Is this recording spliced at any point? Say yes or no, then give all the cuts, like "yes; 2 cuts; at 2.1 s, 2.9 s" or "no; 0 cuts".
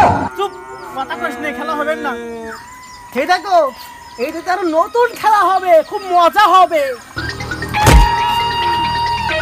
yes; 1 cut; at 2.3 s